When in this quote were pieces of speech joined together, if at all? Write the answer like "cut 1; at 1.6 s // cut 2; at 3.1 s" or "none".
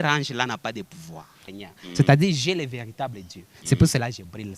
cut 1; at 1.4 s